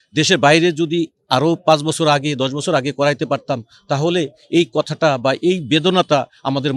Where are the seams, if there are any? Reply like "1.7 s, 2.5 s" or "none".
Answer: none